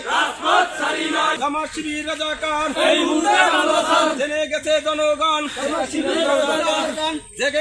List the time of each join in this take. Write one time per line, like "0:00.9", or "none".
0:01.4

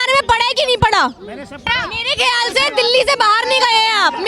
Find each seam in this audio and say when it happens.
0:01.7

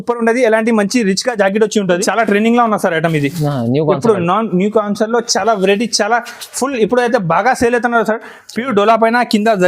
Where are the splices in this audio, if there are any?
0:02.0

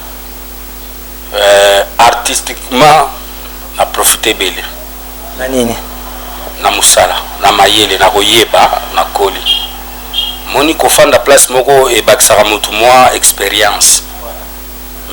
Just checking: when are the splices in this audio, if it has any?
none

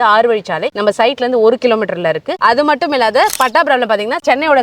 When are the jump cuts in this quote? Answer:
0:02.3

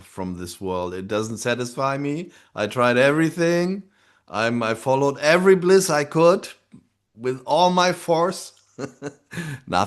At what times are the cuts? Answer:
none

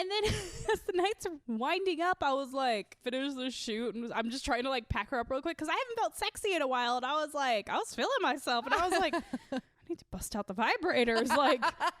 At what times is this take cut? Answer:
0:01.3
0:03.0

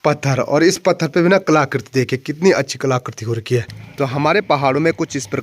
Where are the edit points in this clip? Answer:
0:03.8

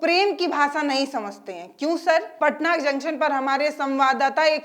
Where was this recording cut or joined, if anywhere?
0:02.3

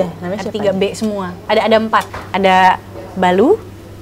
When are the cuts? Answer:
0:01.3
0:02.2

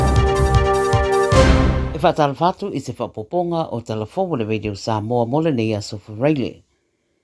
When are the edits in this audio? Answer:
0:01.9

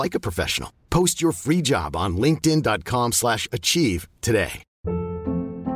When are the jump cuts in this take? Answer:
0:04.7

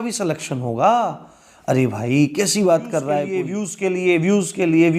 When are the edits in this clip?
0:03.5

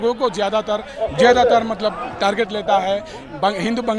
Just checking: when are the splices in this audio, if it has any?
none

